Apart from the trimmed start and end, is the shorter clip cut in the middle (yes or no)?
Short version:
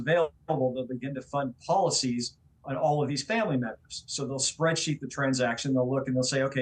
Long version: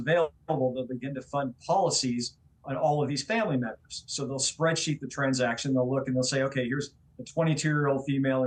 no